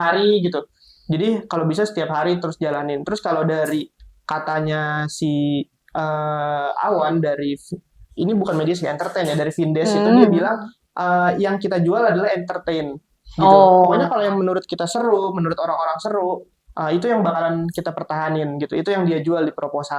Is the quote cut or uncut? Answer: uncut